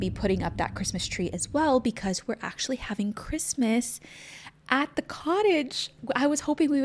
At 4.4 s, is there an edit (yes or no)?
no